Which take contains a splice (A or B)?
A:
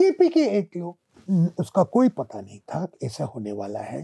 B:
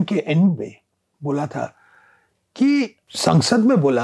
B